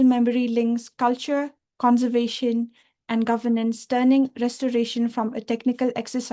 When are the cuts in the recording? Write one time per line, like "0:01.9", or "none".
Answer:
none